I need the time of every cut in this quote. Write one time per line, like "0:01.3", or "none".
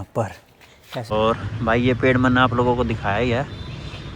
0:00.9